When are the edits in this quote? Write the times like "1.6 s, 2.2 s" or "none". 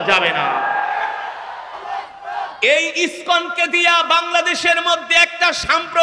1.8 s

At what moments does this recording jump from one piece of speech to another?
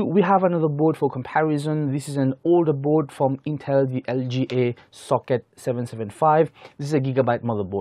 none

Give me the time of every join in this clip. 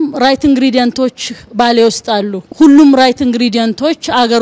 2.4 s

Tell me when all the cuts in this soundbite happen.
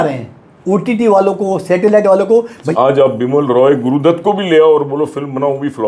2.7 s

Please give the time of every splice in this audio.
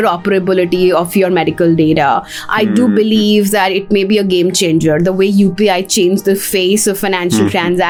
none

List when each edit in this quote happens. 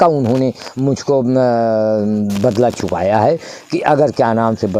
none

